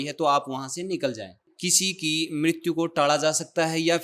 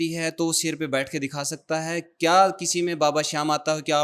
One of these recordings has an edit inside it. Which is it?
first; 1 cut; at 1.5 s

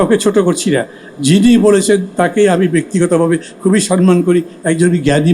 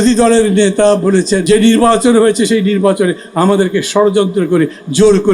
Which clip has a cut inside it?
second; 1 cut; at 1.4 s

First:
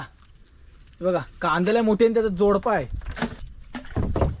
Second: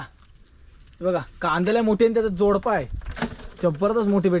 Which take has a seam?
first; 1 cut; at 3.4 s

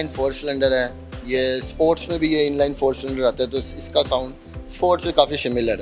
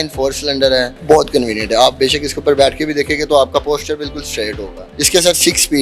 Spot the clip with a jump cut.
second; 2 cuts; at 0.9 s, 4.9 s

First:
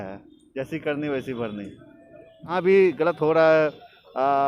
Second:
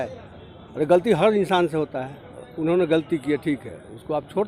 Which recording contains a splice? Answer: first; 1 cut; at 2.5 s

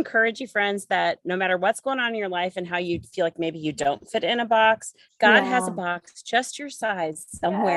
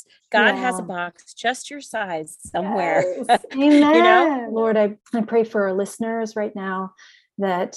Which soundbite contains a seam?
second; 1 cut; at 4.4 s

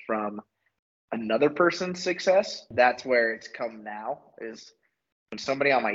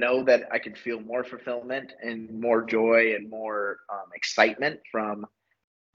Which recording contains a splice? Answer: first; 1 cut; at 2.7 s

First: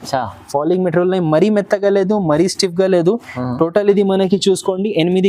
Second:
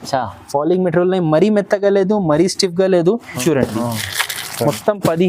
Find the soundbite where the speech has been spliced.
second; 1 cut; at 3.3 s

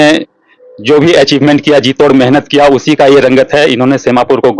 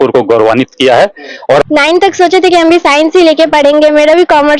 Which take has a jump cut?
second; 1 cut; at 1.4 s

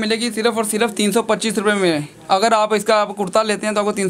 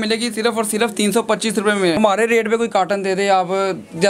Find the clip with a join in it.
second; 1 cut; at 2.0 s

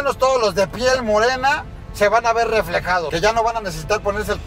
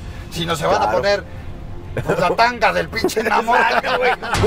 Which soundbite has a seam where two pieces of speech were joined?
first; 1 cut; at 3.1 s

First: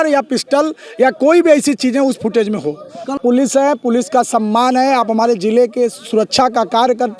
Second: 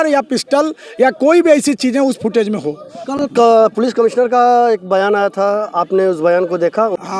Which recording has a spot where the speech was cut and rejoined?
first; 1 cut; at 3.2 s

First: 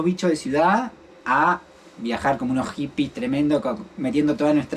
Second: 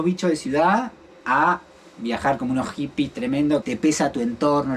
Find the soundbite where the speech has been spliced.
second; 1 cut; at 3.6 s

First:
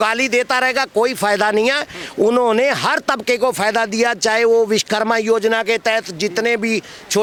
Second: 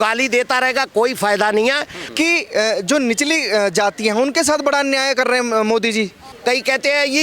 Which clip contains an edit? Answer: second; 2 cuts; at 2.0 s, 6.2 s

